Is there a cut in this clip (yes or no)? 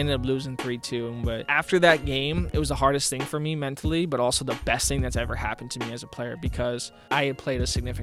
yes